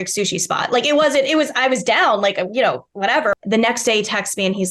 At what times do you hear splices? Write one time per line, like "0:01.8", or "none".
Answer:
0:03.4